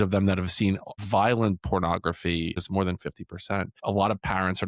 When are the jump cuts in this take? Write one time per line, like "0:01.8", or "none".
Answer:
0:00.9
0:02.6
0:03.7